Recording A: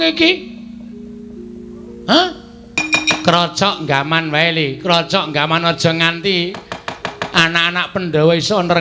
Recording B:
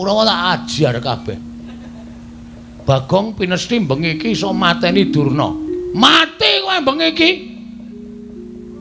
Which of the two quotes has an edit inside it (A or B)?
A